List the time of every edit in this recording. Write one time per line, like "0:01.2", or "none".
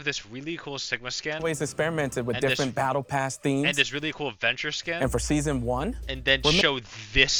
none